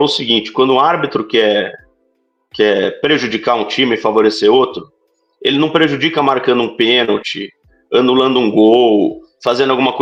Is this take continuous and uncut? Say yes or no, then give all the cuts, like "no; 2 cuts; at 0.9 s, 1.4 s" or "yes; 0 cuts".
yes; 0 cuts